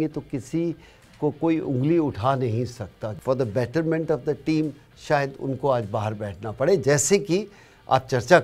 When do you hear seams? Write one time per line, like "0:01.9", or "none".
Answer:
0:03.1